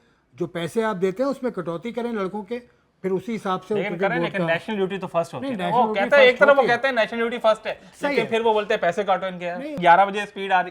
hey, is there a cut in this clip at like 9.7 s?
yes; 1 cut; at 9.7 s

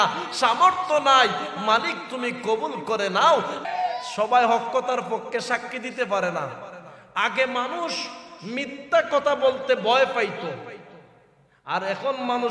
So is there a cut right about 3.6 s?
yes; 1 cut; at 3.6 s

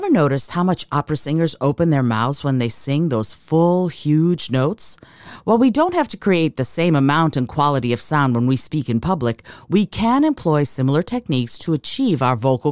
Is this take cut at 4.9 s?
no; 0 cuts

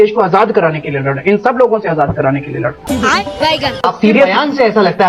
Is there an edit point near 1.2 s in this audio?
no; 1 cut; at 3.8 s

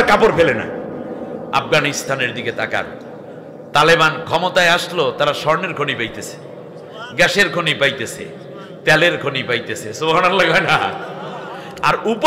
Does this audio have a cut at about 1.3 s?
yes; 1 cut; at 1.3 s

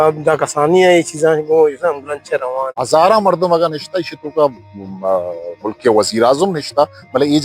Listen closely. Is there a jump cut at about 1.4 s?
no; 1 cut; at 2.7 s

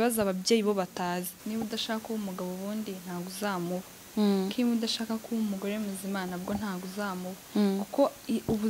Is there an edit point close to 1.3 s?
yes; 1 cut; at 1.3 s

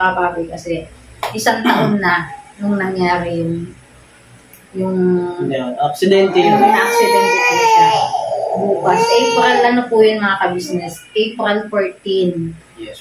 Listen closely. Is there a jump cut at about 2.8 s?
no; 0 cuts

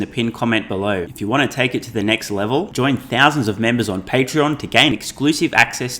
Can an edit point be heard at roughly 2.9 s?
no; 1 cut; at 1.1 s

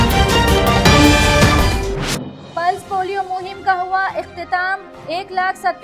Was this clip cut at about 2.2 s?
yes; 1 cut; at 2.2 s

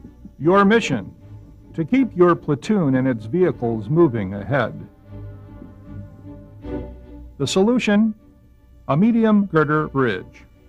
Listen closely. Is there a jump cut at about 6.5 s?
yes; 1 cut; at 6.5 s

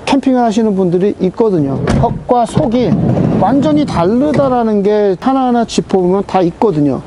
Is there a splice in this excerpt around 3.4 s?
no; 2 cuts; at 1.8 s, 5.2 s

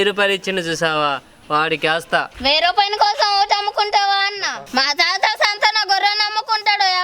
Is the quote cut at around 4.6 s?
yes; 1 cut; at 4.6 s

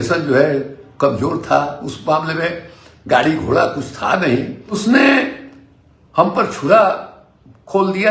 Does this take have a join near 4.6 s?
yes; 1 cut; at 4.6 s

